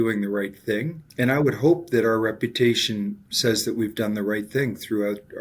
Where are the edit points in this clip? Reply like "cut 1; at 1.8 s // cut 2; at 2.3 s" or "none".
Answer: cut 1; at 1.2 s // cut 2; at 3.3 s